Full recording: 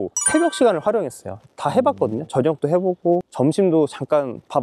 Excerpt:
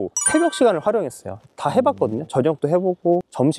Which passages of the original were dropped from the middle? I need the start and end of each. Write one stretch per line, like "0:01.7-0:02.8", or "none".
none